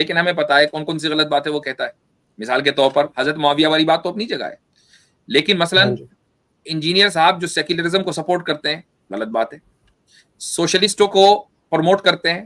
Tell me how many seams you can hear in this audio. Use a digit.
0